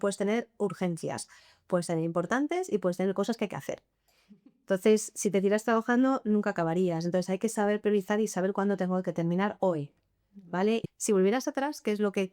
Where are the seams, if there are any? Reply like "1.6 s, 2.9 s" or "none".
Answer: 10.8 s